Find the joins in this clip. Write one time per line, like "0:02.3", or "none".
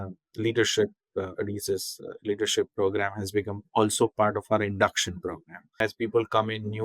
0:05.8